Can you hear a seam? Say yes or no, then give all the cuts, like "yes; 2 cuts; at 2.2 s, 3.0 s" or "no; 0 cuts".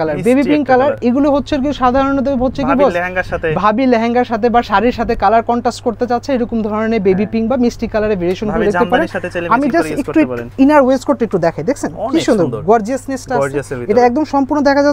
no; 0 cuts